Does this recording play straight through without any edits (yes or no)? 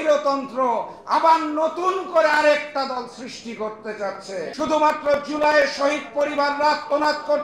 no